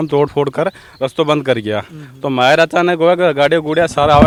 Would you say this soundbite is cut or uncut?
uncut